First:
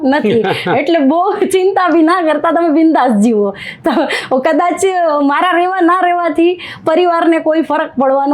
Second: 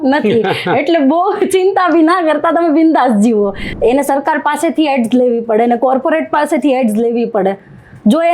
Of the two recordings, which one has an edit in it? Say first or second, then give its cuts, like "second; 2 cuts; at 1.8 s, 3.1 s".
second; 1 cut; at 3.6 s